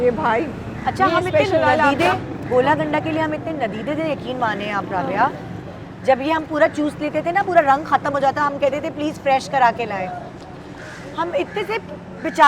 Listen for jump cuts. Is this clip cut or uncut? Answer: uncut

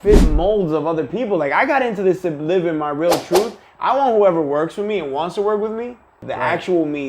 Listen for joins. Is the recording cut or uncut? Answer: cut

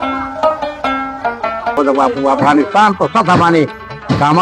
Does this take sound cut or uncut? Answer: cut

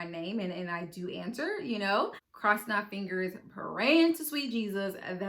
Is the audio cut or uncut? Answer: cut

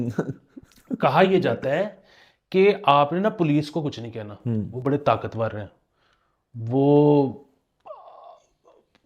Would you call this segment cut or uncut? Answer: uncut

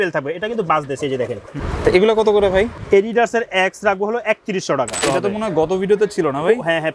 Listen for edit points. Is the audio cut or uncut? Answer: cut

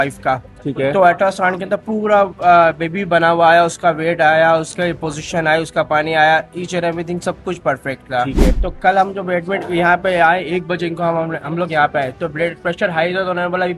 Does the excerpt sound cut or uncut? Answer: uncut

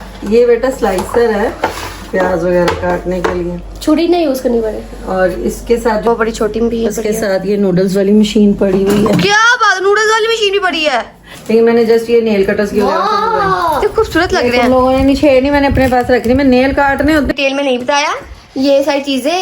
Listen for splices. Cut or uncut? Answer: cut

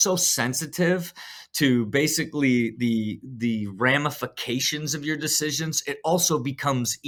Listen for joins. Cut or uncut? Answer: uncut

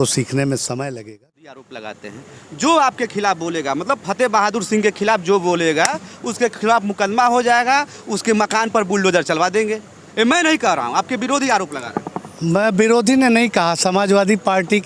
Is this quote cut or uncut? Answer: cut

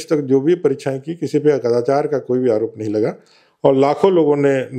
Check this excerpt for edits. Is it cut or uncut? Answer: uncut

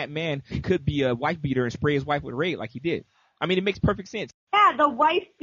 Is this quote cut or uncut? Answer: cut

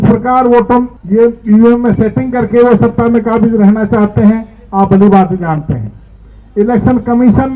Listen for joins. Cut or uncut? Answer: cut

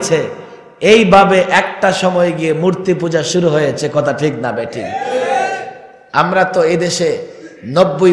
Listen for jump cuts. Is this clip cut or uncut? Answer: uncut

